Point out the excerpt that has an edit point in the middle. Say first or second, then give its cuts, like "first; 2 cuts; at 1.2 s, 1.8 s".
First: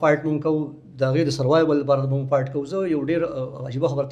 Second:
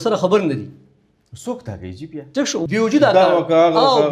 second; 1 cut; at 2.7 s